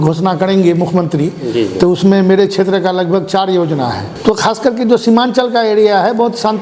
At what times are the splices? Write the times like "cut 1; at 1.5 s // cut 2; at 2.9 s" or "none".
cut 1; at 4.1 s